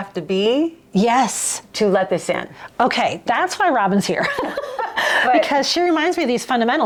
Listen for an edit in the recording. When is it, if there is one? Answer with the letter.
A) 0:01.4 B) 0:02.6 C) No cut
C